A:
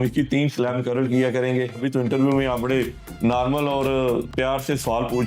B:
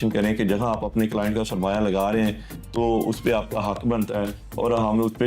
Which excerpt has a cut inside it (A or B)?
A